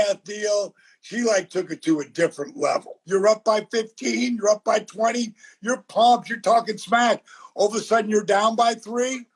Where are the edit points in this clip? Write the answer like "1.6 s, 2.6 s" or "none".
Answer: 2.9 s